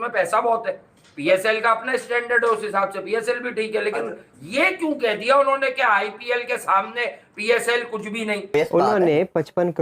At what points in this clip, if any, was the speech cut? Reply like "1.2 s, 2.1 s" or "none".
8.5 s